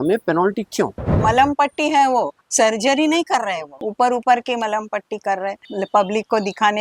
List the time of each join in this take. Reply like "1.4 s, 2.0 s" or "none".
1.1 s, 3.8 s, 5.6 s